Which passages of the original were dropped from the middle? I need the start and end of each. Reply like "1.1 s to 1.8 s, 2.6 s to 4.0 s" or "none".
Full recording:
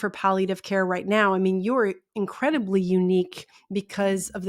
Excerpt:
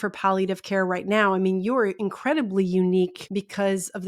2.0 s to 2.2 s, 3.4 s to 3.6 s